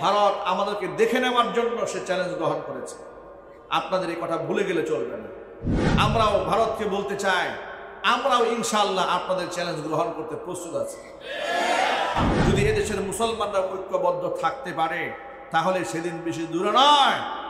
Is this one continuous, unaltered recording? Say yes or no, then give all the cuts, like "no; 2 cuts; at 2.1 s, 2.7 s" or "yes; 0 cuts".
yes; 0 cuts